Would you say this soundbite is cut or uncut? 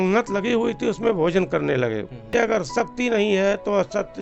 cut